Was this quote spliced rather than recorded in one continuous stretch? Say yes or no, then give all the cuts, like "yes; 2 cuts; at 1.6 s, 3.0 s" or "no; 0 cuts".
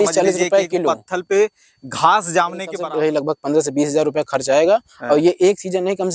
yes; 1 cut; at 2.7 s